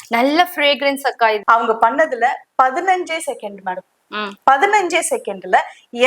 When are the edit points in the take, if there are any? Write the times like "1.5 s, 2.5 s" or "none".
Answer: 1.4 s

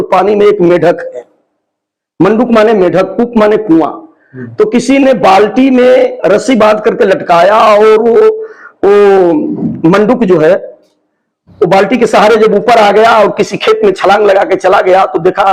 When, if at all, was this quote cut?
none

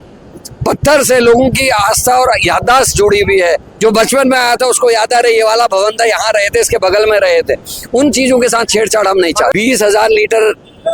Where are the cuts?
9.5 s

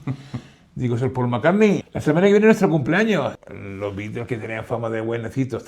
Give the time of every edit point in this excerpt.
1.9 s, 3.4 s

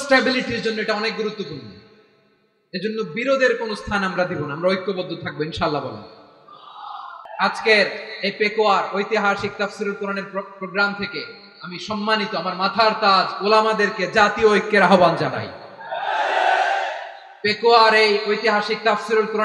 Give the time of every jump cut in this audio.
7.2 s

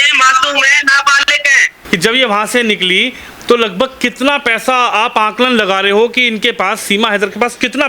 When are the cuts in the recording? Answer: 1.7 s

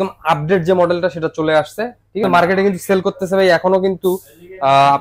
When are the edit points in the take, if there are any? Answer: 2.2 s

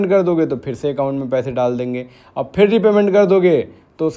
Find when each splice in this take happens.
none

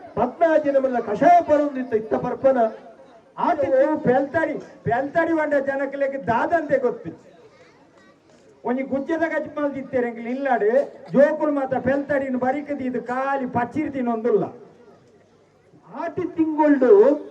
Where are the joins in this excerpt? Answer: 3.6 s, 16.2 s

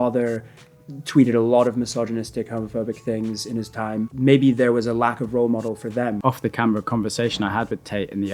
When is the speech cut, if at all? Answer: 4.1 s, 6.2 s

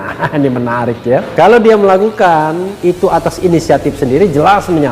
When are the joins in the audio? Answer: 1.3 s

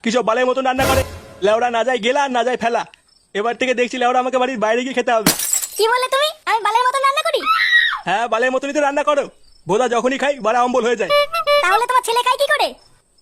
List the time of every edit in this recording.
1.2 s

